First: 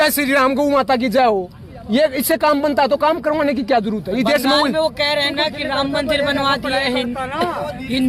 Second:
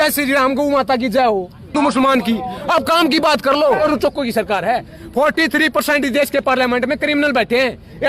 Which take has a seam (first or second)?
second